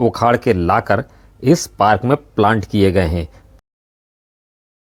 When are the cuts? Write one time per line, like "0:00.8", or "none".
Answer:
none